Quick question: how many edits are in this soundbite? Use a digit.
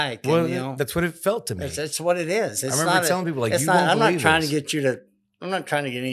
0